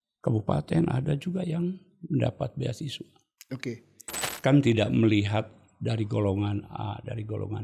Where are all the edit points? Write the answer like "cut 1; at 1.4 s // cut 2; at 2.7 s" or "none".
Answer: cut 1; at 4.2 s